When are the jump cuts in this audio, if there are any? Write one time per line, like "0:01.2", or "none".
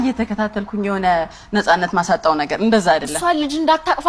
none

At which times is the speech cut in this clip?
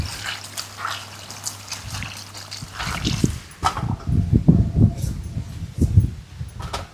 0:02.9

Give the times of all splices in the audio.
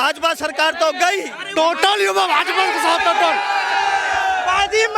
0:01.4

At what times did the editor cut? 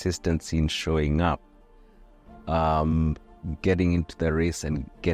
none

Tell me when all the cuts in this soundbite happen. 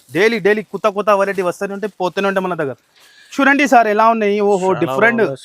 0:03.3

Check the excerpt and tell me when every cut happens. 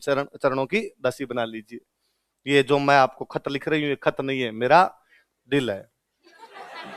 none

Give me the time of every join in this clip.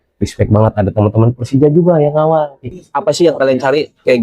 0:02.7

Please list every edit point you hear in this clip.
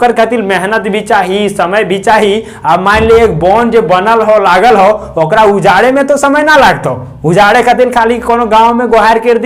none

